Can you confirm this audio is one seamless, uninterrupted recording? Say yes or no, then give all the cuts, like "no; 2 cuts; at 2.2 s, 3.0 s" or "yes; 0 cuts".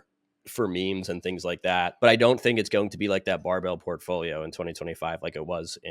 no; 1 cut; at 1.9 s